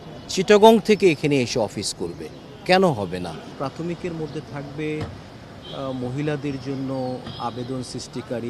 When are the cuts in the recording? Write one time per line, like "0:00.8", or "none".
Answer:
0:03.5